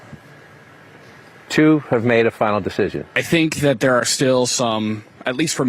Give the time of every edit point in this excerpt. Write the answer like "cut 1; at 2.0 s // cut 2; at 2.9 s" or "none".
cut 1; at 3.1 s

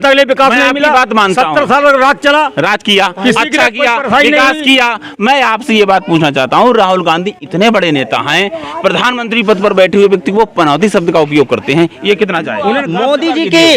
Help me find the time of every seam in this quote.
cut 1; at 12.8 s

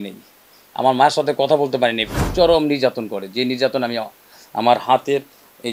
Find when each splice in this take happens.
cut 1; at 2.1 s

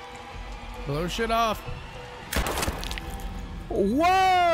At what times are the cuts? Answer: cut 1; at 2.4 s

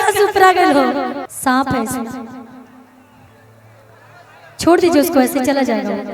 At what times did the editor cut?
cut 1; at 1.3 s

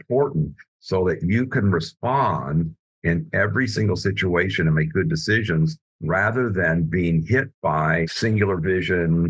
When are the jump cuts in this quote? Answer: cut 1; at 8.1 s

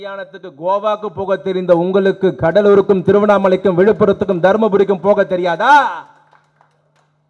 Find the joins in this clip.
none

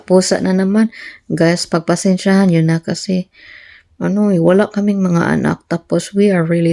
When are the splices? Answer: none

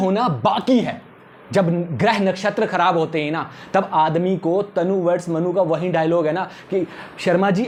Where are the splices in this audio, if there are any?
none

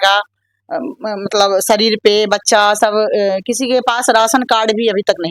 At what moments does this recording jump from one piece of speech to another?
none

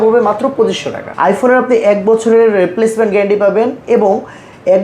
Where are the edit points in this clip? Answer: cut 1; at 1.0 s

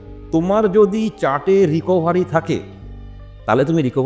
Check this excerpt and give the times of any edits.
none

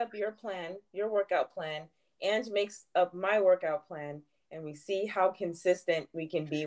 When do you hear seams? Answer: none

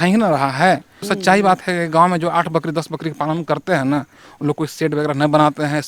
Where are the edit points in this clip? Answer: cut 1; at 1.1 s

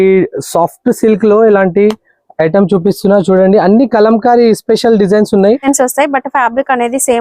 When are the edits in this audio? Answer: cut 1; at 5.6 s

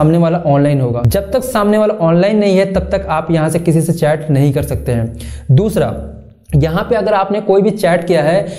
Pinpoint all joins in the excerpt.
cut 1; at 1.0 s

